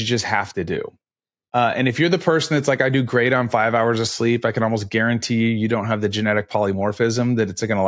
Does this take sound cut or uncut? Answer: uncut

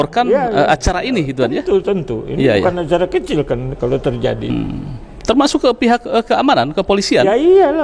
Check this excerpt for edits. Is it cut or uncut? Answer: cut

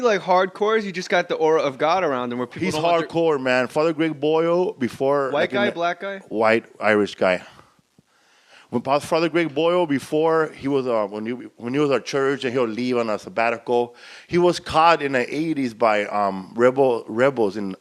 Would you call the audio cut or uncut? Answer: uncut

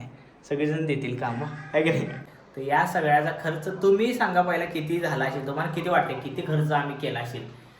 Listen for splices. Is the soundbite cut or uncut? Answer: cut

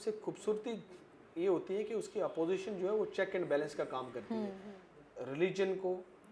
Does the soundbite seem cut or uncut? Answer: cut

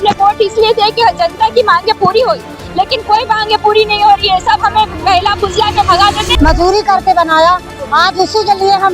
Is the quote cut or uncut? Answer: cut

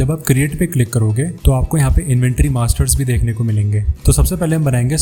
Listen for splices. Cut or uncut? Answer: uncut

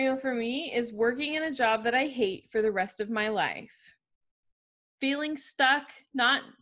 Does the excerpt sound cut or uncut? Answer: uncut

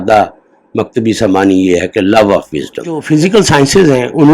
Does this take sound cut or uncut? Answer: cut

